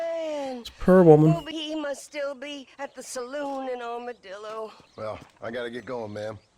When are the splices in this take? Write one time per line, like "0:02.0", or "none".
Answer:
0:01.5
0:04.8